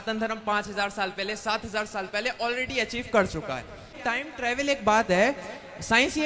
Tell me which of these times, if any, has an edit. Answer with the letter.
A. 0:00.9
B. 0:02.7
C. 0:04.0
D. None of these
C